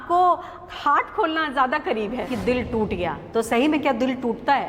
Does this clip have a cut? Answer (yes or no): yes